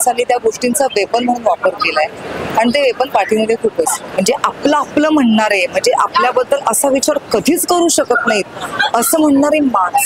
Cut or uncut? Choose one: cut